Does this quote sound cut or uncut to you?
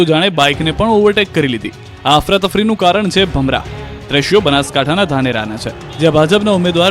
cut